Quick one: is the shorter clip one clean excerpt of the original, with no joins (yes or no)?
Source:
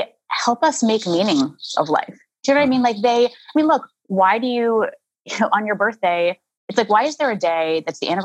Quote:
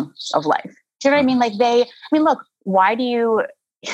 yes